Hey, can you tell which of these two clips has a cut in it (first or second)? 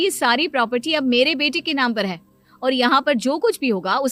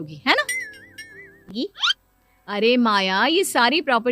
second